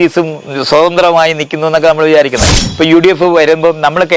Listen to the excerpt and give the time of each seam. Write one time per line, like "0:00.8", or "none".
0:02.6